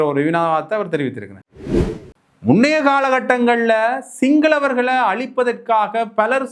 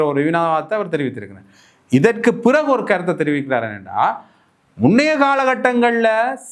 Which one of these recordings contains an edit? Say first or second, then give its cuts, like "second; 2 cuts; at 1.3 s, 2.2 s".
first; 1 cut; at 1.8 s